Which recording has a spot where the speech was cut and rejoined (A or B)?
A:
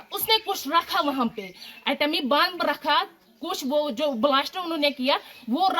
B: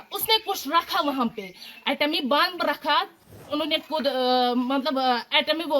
B